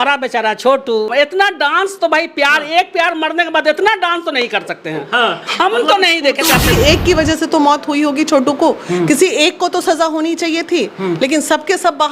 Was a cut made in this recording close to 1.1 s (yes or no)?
yes